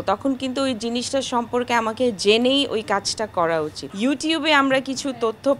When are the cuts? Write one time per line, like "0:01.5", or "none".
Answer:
0:03.8